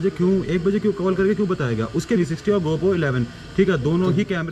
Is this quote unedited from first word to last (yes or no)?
no